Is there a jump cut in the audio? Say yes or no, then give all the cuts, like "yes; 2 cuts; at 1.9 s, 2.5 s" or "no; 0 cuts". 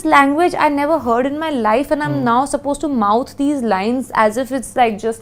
no; 0 cuts